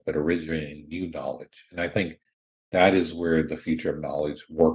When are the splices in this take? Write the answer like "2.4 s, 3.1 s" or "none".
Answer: none